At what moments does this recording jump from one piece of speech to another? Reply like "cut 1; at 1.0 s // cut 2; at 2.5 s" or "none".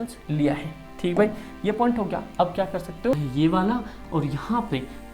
cut 1; at 3.1 s